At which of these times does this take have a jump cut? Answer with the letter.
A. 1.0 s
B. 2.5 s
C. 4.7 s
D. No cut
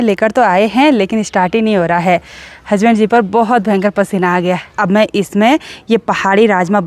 C